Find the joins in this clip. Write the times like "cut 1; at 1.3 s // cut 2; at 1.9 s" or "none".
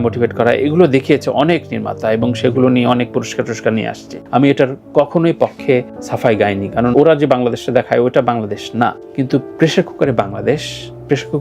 cut 1; at 6.9 s